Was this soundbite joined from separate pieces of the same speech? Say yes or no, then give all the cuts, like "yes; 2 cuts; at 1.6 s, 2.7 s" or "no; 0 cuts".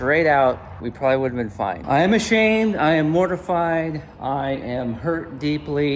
yes; 1 cut; at 1.8 s